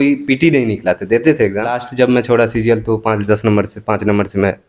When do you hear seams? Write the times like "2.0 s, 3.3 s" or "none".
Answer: 1.8 s